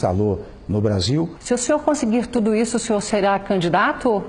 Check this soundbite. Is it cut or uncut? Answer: cut